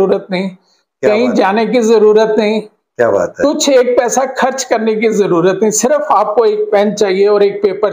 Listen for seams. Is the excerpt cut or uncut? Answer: uncut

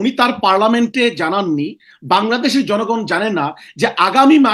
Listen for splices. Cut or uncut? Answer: uncut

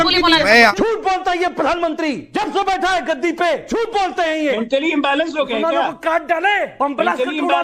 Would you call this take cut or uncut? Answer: cut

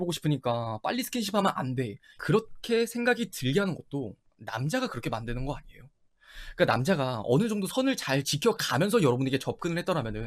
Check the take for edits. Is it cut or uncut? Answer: cut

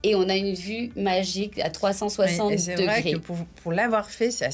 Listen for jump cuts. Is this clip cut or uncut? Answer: uncut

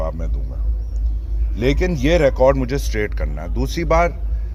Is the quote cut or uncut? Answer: uncut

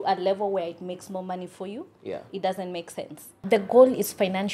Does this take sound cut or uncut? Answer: cut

